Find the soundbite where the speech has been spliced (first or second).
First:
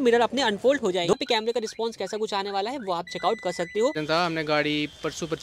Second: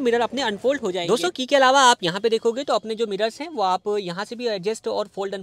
first